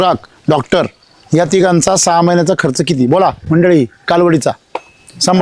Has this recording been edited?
no; 0 cuts

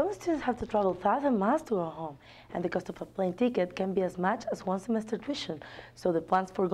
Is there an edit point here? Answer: no; 0 cuts

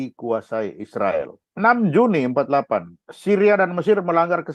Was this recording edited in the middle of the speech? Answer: yes; 1 cut; at 1.4 s

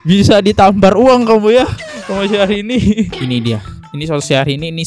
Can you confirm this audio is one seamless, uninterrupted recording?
no; 1 cut; at 3.1 s

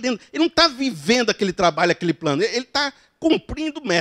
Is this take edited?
no; 0 cuts

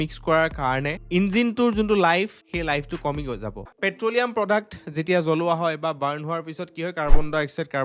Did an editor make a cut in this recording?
yes; 1 cut; at 3.7 s

